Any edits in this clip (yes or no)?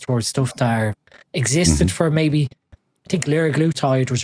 no